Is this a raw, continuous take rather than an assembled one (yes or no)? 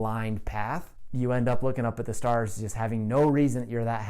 no